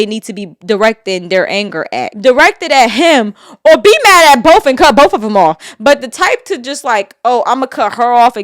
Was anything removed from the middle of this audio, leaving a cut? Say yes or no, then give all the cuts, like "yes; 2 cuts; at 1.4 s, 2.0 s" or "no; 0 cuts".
yes; 1 cut; at 2.1 s